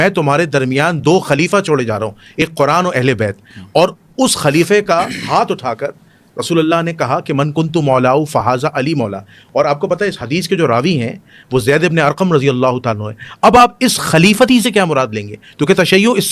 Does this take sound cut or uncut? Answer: uncut